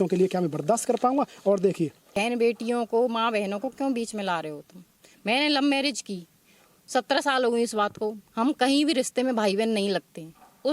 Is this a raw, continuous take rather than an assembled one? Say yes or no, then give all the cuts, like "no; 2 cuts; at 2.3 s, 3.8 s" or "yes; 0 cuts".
no; 1 cut; at 2.2 s